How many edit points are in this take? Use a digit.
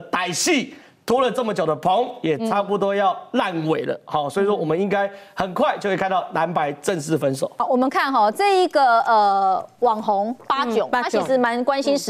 0